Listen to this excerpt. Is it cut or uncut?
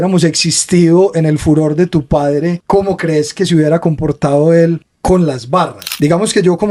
cut